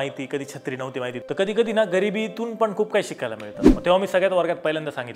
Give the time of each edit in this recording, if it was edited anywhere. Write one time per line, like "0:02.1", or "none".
0:01.2
0:03.7